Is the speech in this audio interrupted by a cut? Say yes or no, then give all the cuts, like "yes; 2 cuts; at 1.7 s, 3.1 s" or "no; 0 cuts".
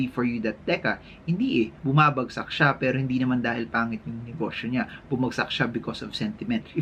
no; 0 cuts